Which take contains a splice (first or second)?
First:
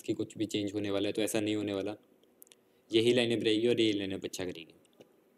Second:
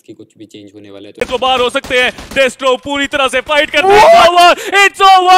second